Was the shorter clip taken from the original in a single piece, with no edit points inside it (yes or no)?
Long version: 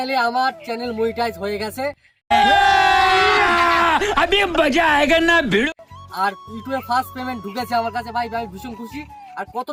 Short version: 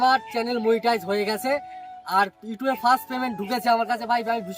no